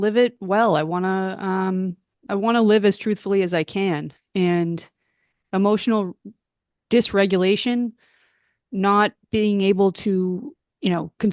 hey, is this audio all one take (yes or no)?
no